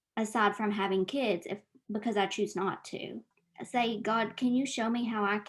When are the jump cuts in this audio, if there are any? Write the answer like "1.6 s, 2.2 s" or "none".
3.3 s

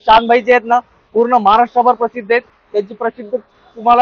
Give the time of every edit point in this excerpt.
none

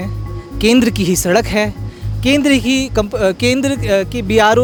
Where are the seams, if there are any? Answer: none

